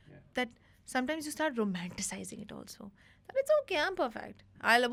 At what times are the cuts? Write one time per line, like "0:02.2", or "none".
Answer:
none

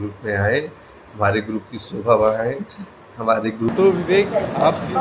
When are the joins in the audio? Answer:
0:03.7

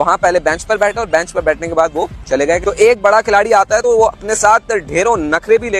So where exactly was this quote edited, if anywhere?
none

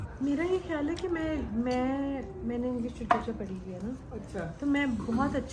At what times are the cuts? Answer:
none

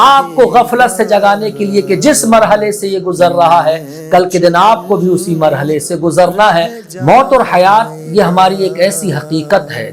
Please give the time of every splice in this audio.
0:06.8

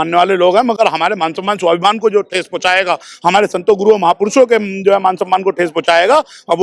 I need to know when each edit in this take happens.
none

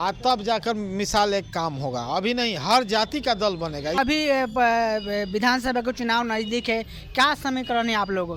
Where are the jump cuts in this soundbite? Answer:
0:04.0

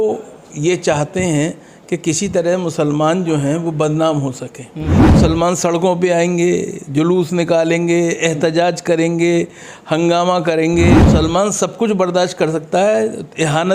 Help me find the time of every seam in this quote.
0:05.1
0:11.1

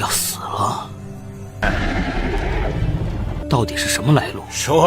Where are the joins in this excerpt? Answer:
none

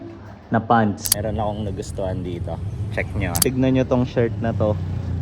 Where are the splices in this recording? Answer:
0:01.1
0:03.4

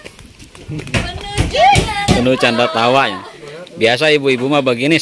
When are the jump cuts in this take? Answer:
none

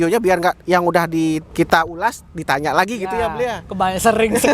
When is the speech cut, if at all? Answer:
0:01.5

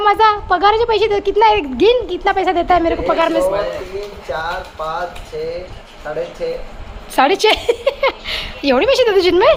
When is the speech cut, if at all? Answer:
none

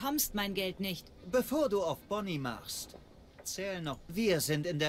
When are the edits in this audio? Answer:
0:04.0

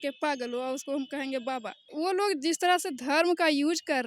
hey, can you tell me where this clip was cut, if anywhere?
0:01.9

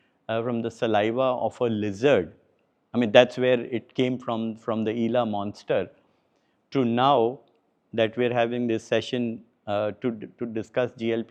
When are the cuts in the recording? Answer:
none

